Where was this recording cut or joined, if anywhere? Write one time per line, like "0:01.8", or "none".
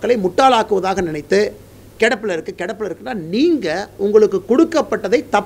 none